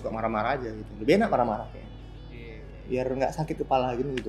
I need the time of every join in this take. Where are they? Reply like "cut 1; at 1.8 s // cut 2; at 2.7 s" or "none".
none